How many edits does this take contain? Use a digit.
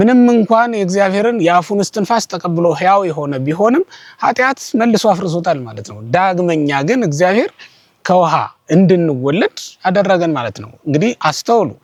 0